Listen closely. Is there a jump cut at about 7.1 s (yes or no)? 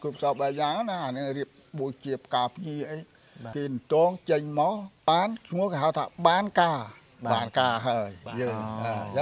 no